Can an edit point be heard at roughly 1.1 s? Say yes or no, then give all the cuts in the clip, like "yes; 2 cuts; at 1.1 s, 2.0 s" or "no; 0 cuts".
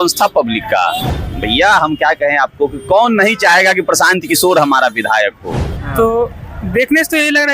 yes; 2 cuts; at 1.1 s, 5.8 s